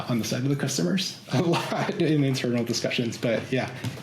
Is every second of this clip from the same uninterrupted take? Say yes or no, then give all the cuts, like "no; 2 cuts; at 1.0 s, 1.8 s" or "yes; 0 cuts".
yes; 0 cuts